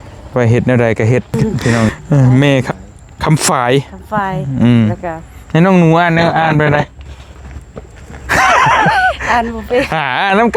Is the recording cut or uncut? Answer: cut